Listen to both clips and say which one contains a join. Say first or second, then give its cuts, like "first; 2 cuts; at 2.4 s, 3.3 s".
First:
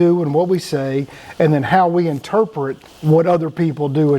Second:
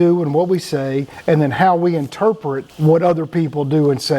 second; 2 cuts; at 1.1 s, 2.7 s